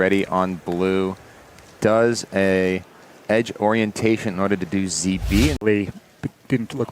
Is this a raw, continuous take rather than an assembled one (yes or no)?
no